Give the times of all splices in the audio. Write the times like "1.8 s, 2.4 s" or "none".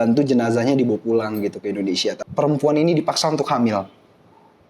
2.2 s